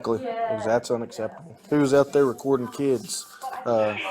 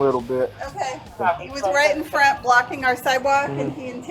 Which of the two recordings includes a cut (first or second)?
first